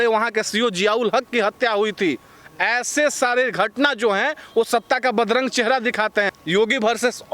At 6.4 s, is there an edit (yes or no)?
yes